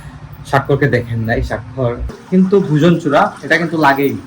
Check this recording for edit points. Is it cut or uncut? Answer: cut